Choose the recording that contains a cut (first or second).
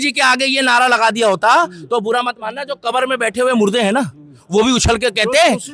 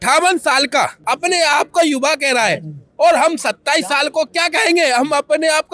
second